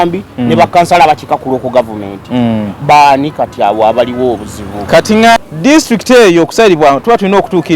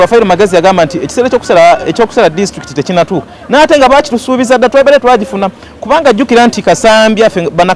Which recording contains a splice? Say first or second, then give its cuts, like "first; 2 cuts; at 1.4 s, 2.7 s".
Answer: first; 1 cut; at 5.4 s